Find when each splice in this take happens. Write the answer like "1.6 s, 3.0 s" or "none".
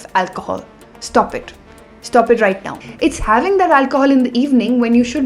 2.8 s